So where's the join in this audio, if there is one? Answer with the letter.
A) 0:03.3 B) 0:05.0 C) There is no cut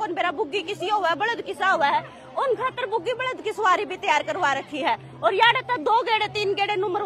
C